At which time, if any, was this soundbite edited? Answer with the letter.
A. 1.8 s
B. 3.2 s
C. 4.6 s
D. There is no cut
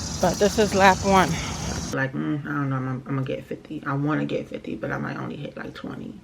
A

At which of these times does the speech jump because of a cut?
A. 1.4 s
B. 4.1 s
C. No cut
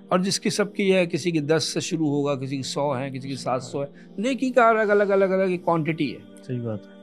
C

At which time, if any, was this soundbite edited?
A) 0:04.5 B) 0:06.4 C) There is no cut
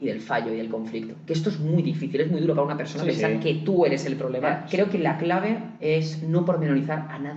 A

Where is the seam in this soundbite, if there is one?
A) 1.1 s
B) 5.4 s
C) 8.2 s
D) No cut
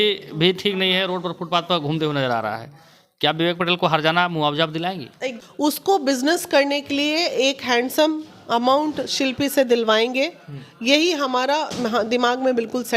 B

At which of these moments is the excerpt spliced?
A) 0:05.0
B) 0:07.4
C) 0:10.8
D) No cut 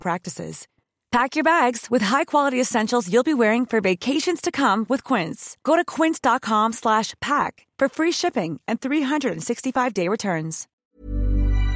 C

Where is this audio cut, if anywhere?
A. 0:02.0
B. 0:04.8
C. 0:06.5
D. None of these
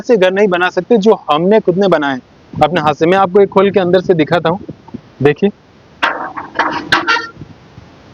D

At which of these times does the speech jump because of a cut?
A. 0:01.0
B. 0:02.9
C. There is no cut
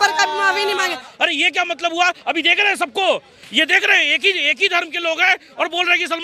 A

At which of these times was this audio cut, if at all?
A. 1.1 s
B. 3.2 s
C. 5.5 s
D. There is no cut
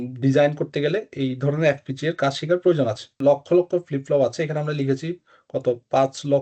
B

